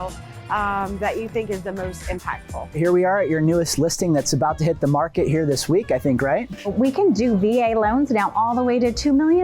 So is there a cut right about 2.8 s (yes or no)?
yes